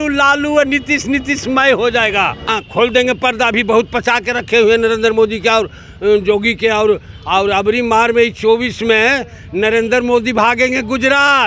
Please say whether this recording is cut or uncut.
cut